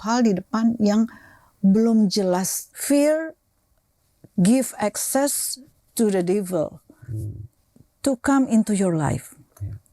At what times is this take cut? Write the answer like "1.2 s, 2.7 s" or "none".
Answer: 2.6 s